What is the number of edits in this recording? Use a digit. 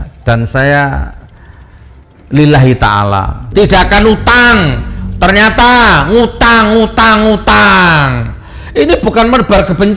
1